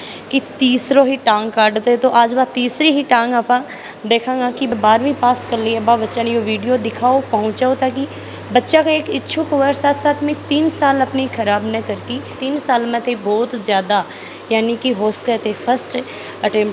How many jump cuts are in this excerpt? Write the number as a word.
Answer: one